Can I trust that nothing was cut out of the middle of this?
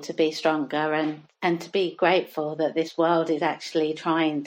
yes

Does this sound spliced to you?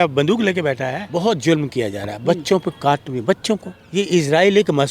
yes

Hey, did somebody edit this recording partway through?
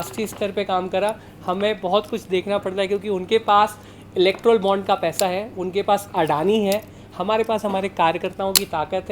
no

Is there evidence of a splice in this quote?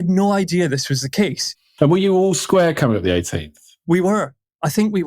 yes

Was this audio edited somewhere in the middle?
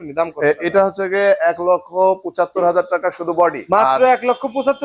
yes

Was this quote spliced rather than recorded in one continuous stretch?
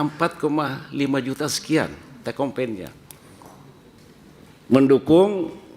yes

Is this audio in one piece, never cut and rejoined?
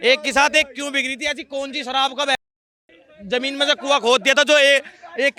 yes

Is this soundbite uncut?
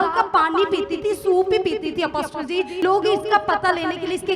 no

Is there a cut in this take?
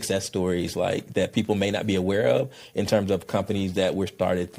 no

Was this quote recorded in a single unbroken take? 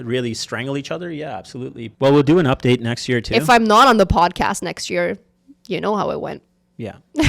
no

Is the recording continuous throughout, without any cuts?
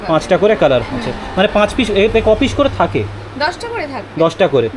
yes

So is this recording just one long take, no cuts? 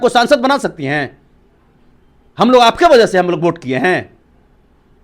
yes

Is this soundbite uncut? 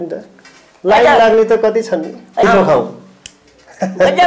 no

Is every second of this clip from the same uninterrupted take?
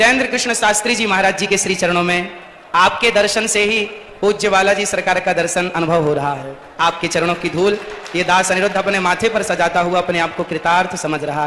yes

